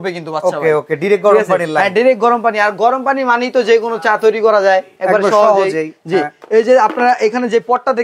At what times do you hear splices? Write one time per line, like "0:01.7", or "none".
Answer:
none